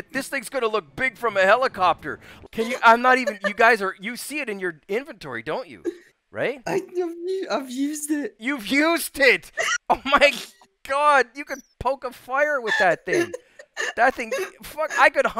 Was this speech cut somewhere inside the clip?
yes; 1 cut; at 2.3 s

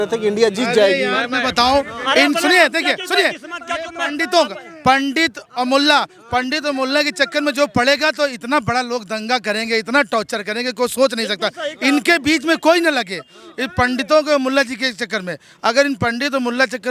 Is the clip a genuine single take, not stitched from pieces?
yes; 0 cuts

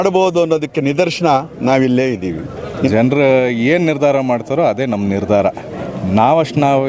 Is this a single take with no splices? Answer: no; 1 cut; at 2.6 s

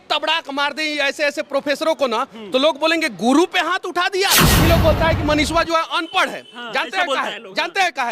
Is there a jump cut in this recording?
yes; 1 cut; at 4.5 s

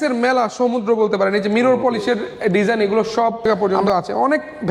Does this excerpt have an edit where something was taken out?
yes; 1 cut; at 3.4 s

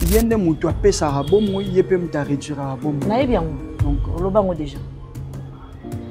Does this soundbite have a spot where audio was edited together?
no; 0 cuts

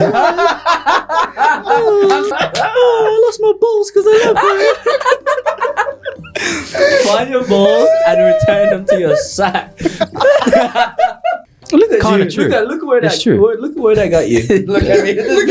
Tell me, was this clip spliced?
yes; 2 cuts; at 2.3 s, 11.5 s

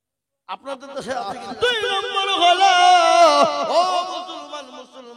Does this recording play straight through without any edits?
no; 1 cut; at 1.5 s

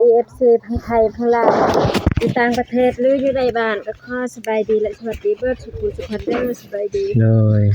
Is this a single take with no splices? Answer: yes; 0 cuts

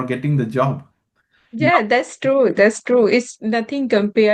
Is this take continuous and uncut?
yes; 0 cuts

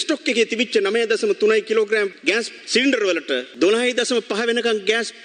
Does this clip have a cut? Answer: no; 0 cuts

